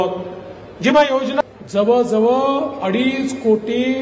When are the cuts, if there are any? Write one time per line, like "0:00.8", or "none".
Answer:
0:01.4